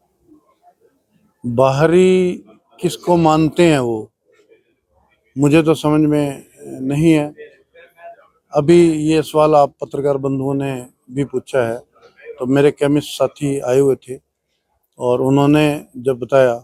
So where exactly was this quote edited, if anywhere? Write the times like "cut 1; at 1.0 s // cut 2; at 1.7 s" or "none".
none